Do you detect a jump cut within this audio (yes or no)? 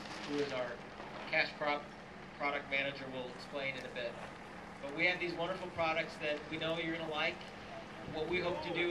no